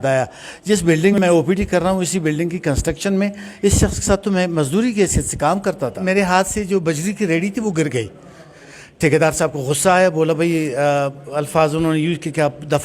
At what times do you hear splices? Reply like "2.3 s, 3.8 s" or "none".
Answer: 1.1 s, 6.0 s